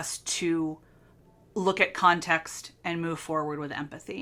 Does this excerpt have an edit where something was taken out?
no; 0 cuts

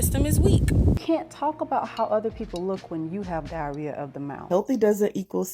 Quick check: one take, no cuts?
no; 2 cuts; at 1.0 s, 4.4 s

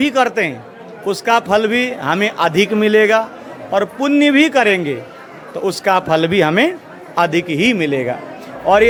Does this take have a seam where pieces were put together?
no; 0 cuts

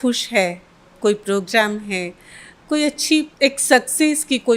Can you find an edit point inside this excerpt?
yes; 1 cut; at 3.3 s

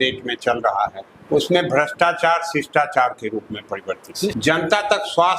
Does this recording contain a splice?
yes; 2 cuts; at 1.1 s, 4.3 s

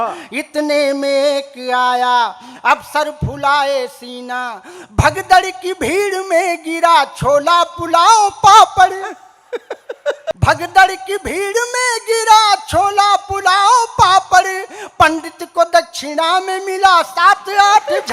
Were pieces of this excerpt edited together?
yes; 1 cut; at 10.3 s

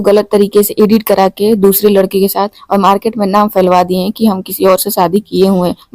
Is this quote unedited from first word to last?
yes; 0 cuts

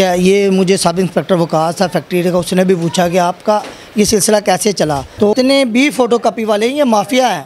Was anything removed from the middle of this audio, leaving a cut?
yes; 1 cut; at 5.3 s

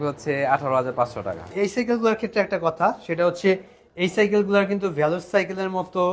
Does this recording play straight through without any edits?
no; 1 cut; at 1.5 s

